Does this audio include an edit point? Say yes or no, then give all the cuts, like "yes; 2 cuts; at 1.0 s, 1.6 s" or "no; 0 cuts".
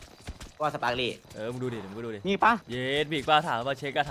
yes; 2 cuts; at 1.3 s, 2.7 s